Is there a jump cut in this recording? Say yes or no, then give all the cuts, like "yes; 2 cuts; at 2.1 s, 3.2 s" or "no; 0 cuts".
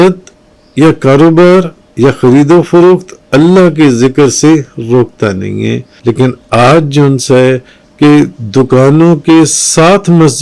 yes; 1 cut; at 5.9 s